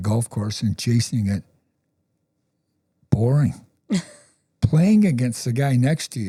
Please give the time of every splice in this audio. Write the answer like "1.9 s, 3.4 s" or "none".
none